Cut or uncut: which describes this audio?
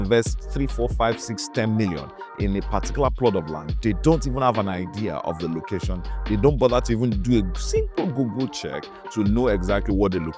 uncut